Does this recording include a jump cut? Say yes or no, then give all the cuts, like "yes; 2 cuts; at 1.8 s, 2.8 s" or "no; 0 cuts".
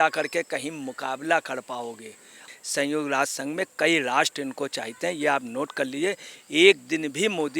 yes; 1 cut; at 2.5 s